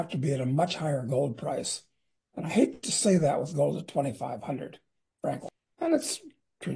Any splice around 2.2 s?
no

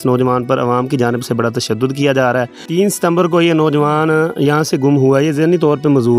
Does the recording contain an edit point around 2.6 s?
yes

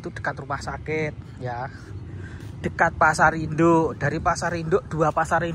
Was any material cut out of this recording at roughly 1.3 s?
no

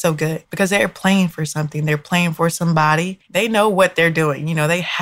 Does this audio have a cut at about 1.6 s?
no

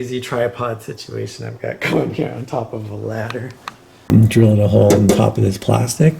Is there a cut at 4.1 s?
yes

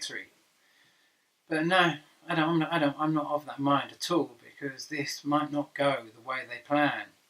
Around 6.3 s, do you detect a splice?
no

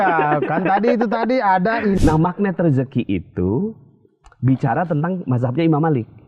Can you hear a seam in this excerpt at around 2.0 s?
yes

